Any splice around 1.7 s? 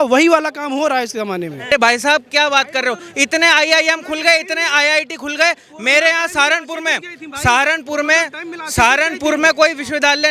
yes; 1 cut; at 1.7 s

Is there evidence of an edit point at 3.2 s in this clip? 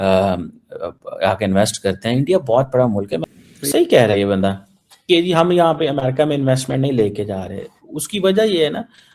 yes; 1 cut; at 3.2 s

